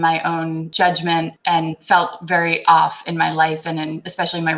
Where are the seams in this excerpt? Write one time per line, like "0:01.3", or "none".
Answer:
0:01.1